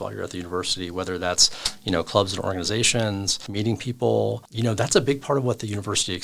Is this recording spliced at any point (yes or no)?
yes